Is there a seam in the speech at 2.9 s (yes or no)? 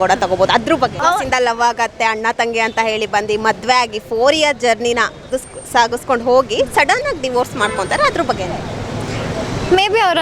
no